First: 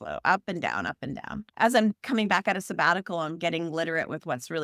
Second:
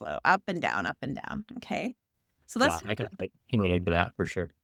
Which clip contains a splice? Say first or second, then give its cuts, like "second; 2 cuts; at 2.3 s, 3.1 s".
first; 1 cut; at 1.5 s